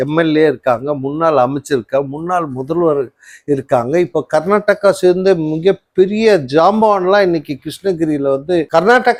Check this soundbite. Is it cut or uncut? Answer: uncut